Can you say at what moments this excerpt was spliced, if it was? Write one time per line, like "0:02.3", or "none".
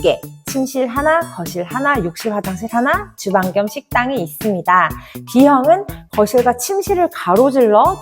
none